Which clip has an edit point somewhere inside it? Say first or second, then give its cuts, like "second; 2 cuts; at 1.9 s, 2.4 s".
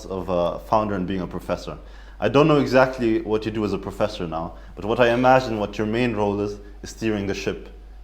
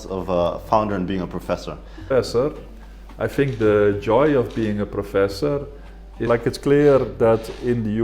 second; 2 cuts; at 2.0 s, 6.3 s